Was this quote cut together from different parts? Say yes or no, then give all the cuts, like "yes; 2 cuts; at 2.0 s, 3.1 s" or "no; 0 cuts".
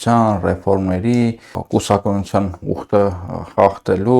yes; 1 cut; at 1.5 s